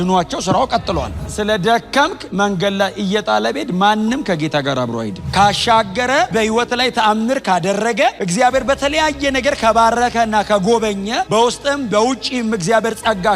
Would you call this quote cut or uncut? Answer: cut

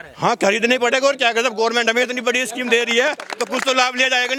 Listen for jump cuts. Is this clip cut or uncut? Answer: uncut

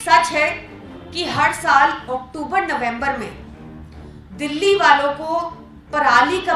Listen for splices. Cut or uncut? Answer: uncut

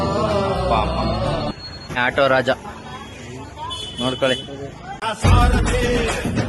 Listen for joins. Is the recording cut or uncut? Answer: cut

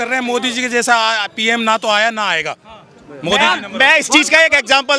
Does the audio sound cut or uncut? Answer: uncut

